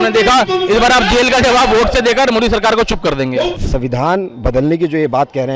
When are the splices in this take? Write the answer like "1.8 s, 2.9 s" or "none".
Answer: 3.6 s